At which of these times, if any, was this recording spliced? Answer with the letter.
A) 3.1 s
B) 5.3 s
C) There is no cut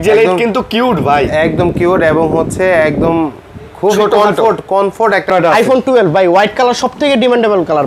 B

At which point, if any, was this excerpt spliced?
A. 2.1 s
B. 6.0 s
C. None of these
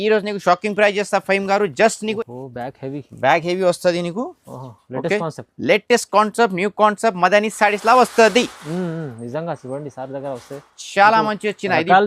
A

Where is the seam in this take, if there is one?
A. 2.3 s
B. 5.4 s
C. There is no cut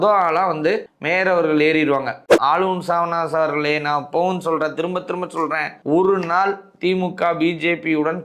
A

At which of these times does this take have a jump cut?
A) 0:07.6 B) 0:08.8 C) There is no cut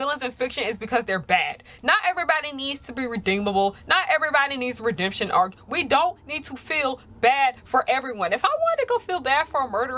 C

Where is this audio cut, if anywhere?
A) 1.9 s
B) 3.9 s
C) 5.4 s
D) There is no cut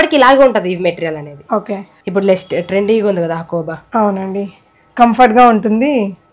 A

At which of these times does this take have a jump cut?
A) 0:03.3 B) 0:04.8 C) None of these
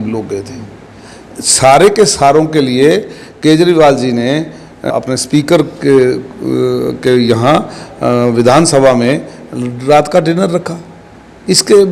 B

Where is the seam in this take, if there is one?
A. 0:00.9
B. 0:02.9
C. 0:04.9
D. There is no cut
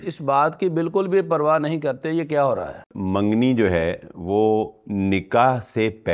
B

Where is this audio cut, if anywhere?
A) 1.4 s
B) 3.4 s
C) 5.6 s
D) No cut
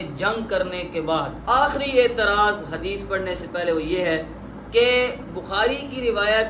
A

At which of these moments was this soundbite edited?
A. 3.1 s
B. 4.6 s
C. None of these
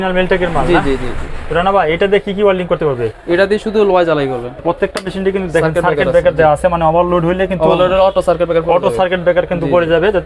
B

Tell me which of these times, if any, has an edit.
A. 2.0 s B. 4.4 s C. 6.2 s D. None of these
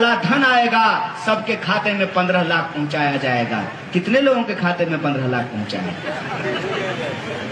D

